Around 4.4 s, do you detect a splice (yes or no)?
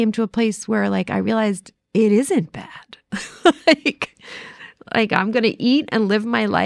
no